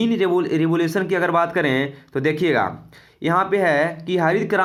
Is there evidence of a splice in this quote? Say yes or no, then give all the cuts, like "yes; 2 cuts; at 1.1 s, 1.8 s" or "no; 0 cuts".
no; 0 cuts